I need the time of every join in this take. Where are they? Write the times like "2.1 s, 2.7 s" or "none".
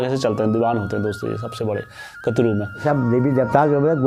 2.8 s